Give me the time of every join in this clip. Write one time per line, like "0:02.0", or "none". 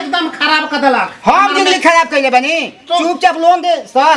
none